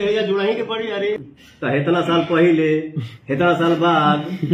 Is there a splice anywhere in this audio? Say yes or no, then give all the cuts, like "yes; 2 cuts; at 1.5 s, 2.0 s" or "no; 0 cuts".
yes; 1 cut; at 1.2 s